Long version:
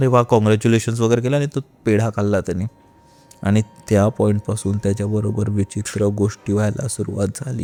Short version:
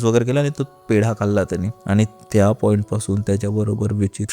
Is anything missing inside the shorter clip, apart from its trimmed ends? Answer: yes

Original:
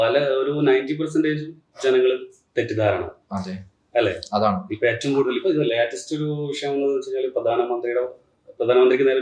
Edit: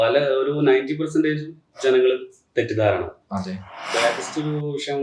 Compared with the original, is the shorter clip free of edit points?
no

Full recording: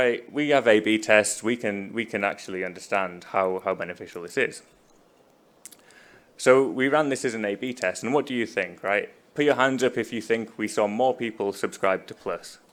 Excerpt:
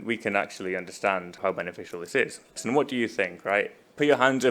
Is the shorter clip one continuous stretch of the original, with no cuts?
no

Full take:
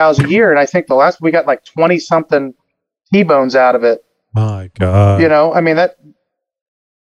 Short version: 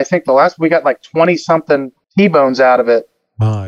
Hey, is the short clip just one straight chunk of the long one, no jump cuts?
no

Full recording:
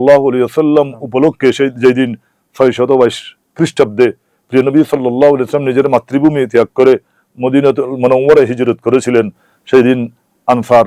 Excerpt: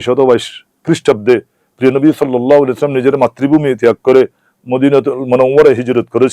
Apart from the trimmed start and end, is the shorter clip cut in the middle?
no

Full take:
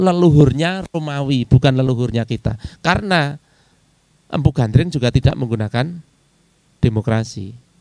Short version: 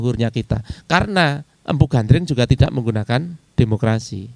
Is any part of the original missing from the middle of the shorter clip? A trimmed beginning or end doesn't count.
yes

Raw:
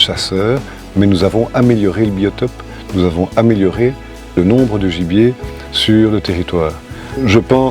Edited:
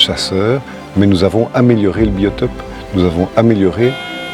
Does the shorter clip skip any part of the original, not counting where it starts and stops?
no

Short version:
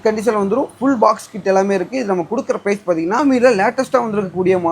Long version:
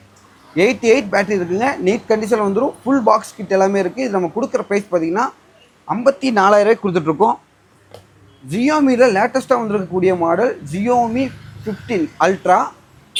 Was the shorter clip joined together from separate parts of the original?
yes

